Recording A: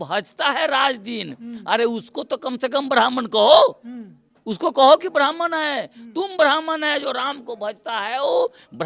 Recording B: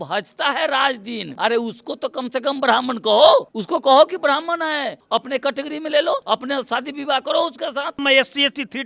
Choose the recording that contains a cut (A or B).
B